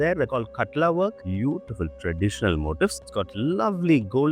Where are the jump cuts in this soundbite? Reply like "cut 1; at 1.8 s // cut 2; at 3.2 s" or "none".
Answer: cut 1; at 1.2 s // cut 2; at 3.0 s